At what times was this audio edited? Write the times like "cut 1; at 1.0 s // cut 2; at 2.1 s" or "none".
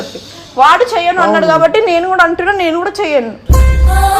none